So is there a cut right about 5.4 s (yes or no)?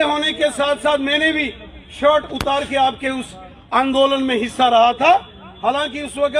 no